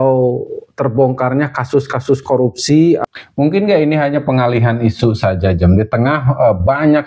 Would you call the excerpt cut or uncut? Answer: cut